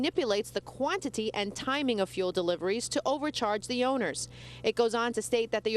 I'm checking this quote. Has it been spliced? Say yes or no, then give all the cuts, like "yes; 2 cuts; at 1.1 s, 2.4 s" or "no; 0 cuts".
yes; 1 cut; at 4.3 s